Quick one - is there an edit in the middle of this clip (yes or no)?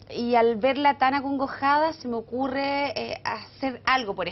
yes